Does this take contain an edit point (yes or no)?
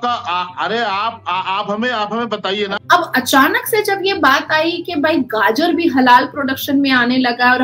yes